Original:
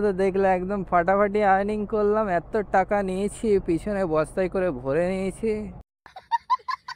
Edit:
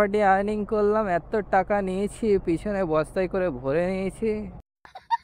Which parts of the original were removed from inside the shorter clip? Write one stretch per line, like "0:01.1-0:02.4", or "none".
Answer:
none